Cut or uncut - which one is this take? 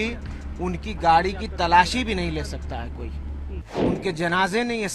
cut